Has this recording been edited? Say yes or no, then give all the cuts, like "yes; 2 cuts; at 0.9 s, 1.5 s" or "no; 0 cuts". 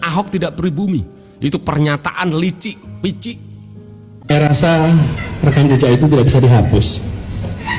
yes; 1 cut; at 4.3 s